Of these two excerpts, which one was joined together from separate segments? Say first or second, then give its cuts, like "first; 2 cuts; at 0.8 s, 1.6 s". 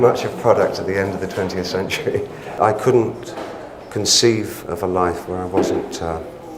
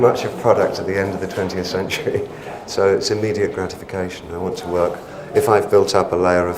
first; 1 cut; at 2.5 s